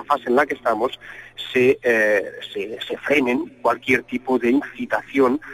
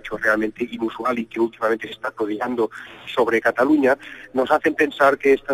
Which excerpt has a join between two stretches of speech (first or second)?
first